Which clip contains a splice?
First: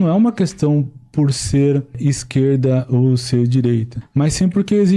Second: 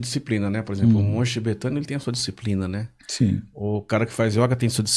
first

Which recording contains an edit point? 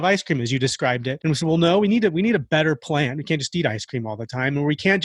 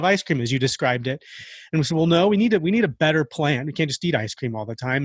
first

